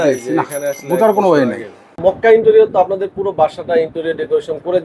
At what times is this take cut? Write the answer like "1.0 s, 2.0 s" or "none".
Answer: 1.9 s